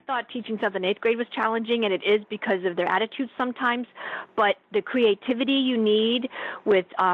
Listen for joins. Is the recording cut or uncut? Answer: uncut